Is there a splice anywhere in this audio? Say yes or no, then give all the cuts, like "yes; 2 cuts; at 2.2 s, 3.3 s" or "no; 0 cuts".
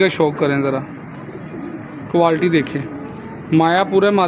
no; 0 cuts